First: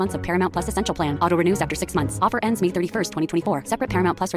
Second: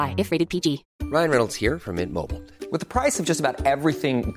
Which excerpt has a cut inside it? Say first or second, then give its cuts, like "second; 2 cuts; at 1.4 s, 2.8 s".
second; 1 cut; at 0.9 s